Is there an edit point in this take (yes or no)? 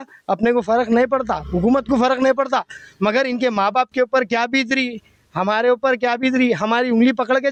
no